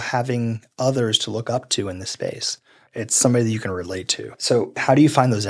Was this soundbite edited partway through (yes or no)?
no